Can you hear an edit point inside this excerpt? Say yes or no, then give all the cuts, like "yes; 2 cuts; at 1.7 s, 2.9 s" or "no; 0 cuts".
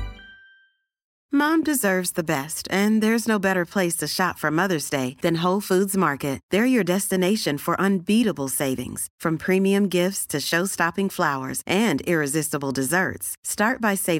yes; 1 cut; at 1.1 s